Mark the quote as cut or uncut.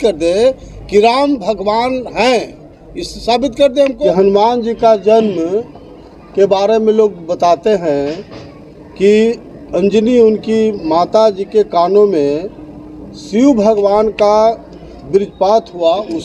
cut